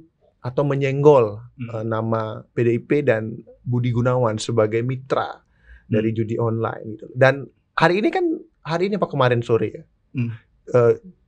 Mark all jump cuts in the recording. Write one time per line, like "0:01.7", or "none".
none